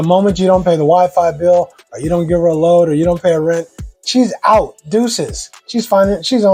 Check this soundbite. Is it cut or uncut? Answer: uncut